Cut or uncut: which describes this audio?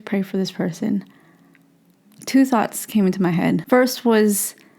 cut